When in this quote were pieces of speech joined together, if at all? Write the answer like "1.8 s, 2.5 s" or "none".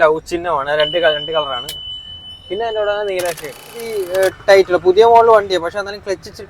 3.8 s